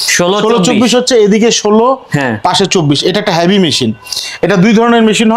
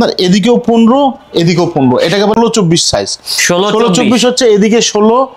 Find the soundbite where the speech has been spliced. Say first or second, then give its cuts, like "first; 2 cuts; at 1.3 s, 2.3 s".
second; 1 cut; at 2.3 s